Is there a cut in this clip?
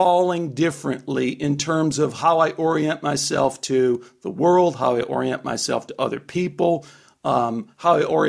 no; 0 cuts

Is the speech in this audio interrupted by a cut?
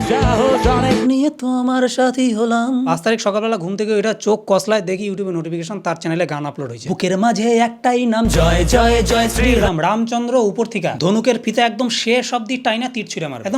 yes; 2 cuts; at 1.0 s, 2.9 s

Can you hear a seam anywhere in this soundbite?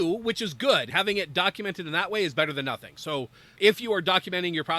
yes; 2 cuts; at 0.9 s, 3.6 s

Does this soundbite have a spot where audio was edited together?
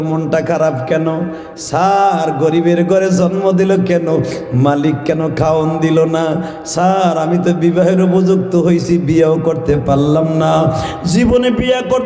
no; 0 cuts

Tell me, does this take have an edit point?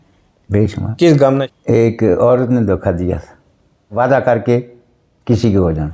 yes; 2 cuts; at 1.5 s, 3.9 s

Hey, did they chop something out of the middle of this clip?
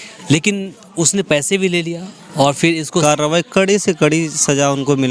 yes; 1 cut; at 3.0 s

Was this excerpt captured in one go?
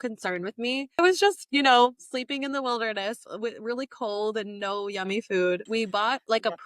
no; 2 cuts; at 1.0 s, 5.6 s

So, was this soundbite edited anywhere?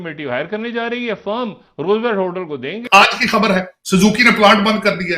yes; 1 cut; at 2.8 s

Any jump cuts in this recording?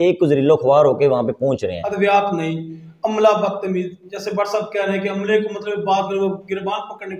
yes; 1 cut; at 1.8 s

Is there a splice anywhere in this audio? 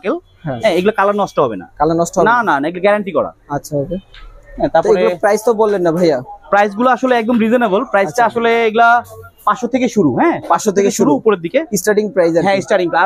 no; 0 cuts

